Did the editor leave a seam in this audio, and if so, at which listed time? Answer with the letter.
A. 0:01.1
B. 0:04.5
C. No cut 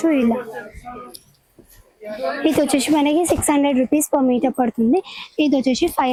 C